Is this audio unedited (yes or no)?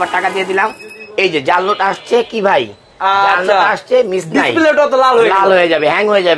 yes